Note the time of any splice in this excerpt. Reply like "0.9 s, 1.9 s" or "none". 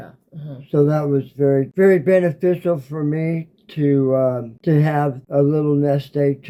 none

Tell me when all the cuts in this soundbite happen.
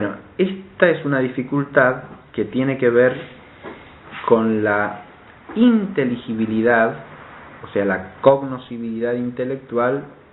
3.2 s

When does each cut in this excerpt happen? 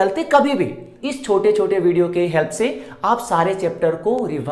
0.9 s

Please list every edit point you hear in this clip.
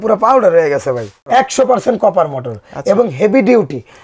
1.3 s

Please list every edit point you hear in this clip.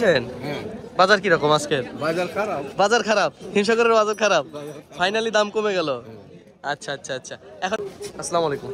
7.8 s

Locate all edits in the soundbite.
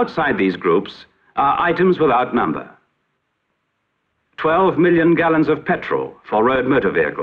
6.2 s

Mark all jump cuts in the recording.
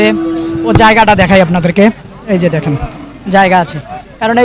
none

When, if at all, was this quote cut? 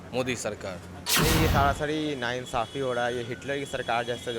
1.0 s

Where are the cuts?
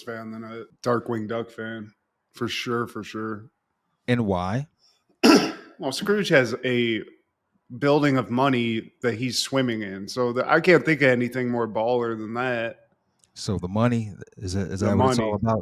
none

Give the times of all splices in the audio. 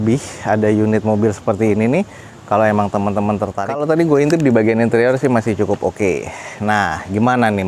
3.6 s

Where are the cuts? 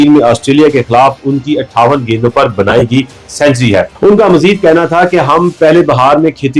3.9 s

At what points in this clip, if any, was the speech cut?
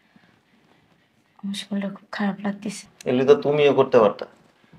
2.9 s

